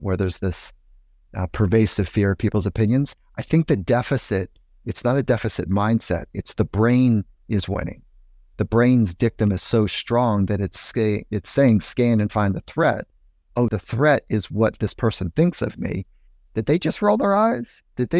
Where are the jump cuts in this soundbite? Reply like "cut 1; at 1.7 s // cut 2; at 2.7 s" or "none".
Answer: cut 1; at 13.7 s